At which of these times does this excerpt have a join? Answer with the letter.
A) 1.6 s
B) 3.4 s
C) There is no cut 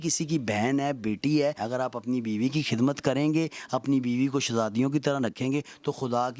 A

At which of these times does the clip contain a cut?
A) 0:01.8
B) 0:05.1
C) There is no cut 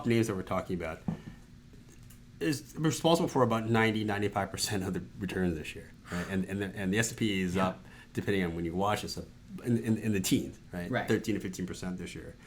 A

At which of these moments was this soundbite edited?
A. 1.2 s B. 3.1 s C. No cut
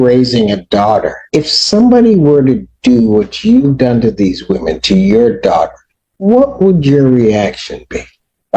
A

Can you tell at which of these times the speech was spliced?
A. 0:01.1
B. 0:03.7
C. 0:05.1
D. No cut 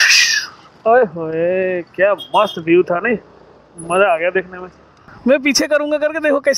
C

